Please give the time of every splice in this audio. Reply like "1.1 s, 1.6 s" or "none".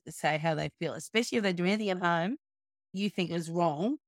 2.9 s